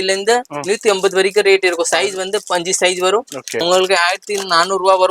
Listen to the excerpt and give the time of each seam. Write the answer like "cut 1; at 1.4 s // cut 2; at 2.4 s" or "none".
cut 1; at 3.6 s